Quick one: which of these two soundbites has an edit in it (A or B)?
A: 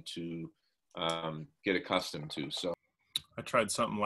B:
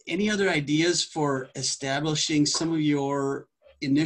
A